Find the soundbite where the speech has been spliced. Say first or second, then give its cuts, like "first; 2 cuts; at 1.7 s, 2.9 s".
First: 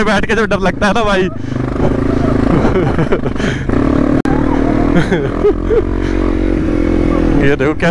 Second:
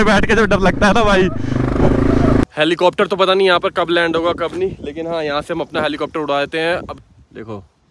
second; 2 cuts; at 2.4 s, 6.9 s